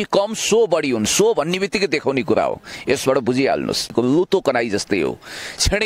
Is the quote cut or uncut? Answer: cut